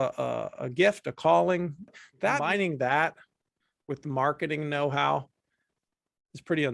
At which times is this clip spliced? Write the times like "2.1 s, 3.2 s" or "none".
1.9 s